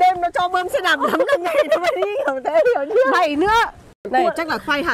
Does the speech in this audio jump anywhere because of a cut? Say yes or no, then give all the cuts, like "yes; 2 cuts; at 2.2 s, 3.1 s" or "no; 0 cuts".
yes; 1 cut; at 3.9 s